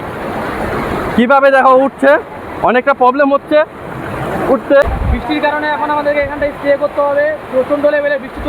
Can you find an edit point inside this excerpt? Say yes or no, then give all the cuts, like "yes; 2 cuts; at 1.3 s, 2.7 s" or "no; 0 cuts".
yes; 1 cut; at 4.8 s